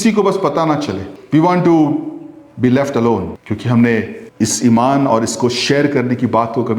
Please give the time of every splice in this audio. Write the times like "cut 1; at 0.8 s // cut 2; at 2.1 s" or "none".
cut 1; at 1.1 s // cut 2; at 3.4 s // cut 3; at 4.2 s